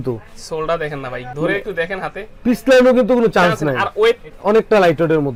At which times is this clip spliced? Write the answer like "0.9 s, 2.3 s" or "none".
none